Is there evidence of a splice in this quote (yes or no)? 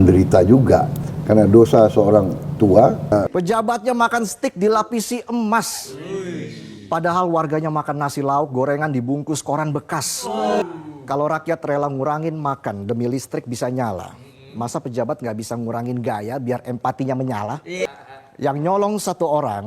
yes